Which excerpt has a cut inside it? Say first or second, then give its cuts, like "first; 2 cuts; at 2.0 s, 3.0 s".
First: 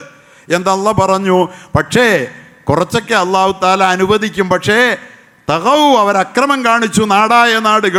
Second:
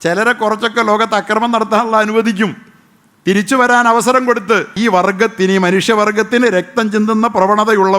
second; 1 cut; at 4.7 s